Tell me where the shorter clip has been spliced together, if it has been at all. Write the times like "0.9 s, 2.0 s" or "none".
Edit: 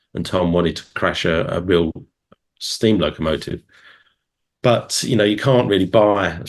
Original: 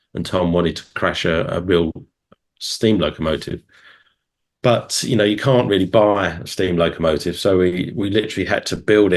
none

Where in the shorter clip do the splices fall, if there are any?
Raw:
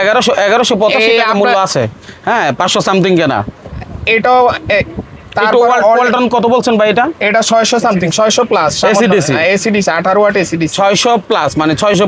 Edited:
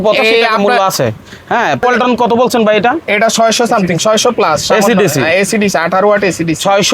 1.8 s

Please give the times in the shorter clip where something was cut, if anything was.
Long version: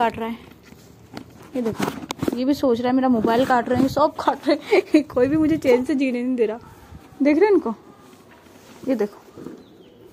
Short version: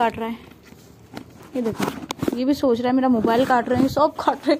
none

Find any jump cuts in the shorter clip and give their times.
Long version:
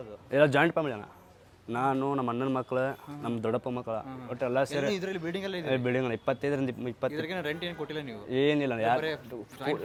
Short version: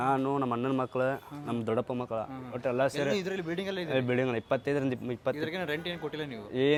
none

